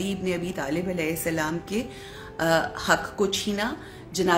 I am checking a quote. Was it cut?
no; 0 cuts

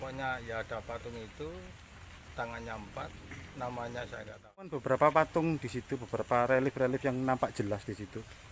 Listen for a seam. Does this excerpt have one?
yes; 1 cut; at 4.8 s

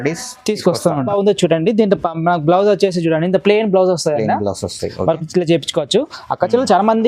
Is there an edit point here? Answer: yes; 1 cut; at 1.1 s

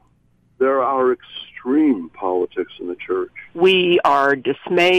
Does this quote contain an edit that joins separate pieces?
yes; 1 cut; at 3.4 s

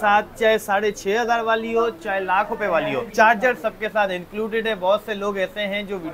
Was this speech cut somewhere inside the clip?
no; 0 cuts

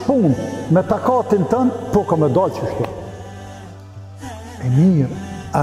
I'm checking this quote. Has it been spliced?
yes; 2 cuts; at 3.1 s, 4.6 s

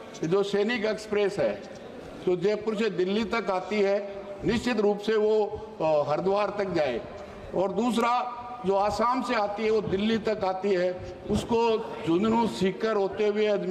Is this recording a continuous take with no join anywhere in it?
yes; 0 cuts

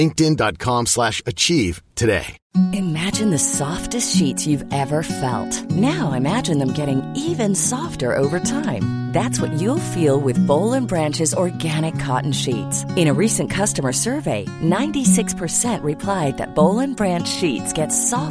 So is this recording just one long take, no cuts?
no; 1 cut; at 2.4 s

